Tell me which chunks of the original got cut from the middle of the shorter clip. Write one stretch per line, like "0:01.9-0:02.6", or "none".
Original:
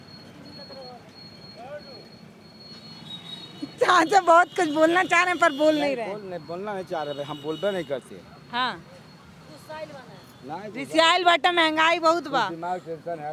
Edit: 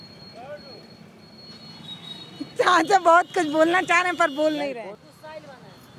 0:06.2-0:09.4